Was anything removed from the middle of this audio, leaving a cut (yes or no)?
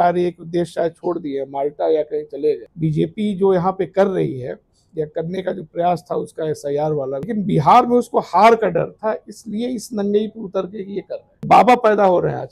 yes